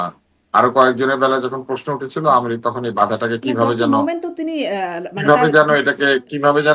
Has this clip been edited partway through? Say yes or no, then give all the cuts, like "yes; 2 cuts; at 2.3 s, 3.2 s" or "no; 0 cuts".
no; 0 cuts